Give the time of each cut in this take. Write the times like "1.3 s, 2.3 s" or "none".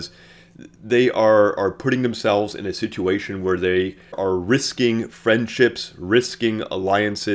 4.2 s